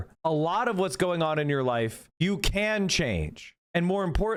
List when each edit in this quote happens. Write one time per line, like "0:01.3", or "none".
none